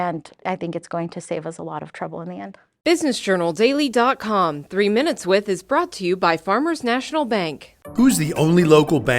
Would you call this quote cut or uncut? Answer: cut